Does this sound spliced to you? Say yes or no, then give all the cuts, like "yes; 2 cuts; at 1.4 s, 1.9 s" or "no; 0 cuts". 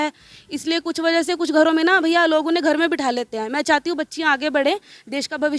no; 0 cuts